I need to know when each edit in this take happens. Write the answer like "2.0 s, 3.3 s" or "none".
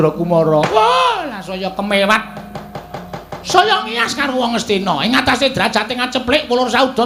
none